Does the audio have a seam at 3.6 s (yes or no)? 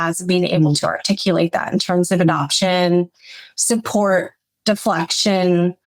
no